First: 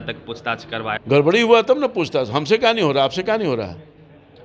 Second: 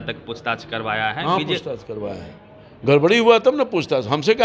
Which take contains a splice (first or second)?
first